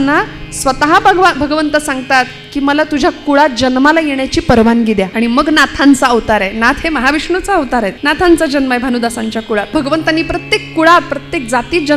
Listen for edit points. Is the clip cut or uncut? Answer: cut